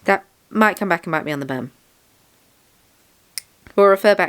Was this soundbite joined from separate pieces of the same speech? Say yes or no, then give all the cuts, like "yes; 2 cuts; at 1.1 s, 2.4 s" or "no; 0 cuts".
no; 0 cuts